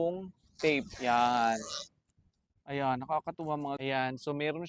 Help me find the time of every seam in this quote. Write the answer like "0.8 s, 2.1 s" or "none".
3.8 s